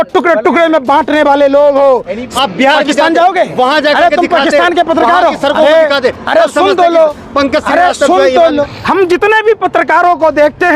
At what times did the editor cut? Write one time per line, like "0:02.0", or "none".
0:02.3
0:08.6